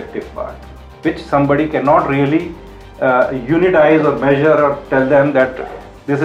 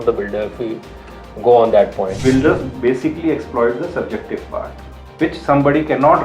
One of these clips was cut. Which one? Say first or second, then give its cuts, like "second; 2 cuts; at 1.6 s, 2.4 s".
second; 1 cut; at 2.2 s